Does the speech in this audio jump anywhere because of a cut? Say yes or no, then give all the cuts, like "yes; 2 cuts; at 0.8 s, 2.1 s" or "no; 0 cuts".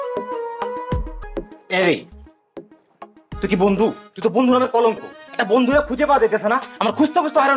yes; 1 cut; at 1.2 s